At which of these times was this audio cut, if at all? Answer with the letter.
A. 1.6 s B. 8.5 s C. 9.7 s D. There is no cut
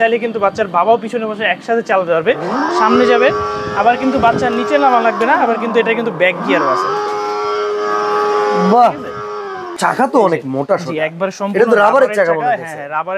C